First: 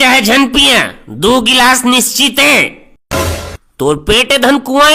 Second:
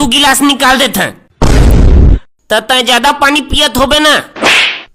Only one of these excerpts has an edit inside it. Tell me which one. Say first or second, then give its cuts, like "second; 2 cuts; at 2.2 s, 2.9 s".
second; 1 cut; at 1.5 s